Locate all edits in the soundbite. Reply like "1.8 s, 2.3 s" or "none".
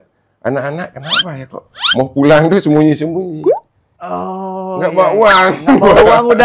none